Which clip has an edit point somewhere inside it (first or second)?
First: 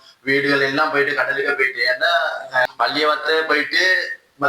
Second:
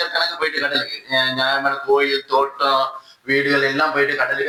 first